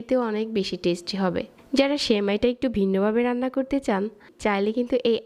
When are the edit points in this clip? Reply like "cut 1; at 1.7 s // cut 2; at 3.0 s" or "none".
cut 1; at 1.5 s // cut 2; at 4.3 s